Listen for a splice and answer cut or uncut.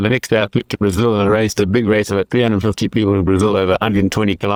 uncut